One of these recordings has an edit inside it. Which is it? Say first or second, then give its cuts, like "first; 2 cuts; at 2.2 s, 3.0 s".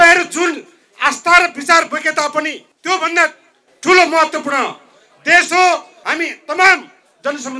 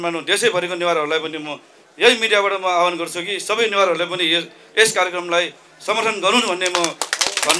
first; 2 cuts; at 2.7 s, 6.0 s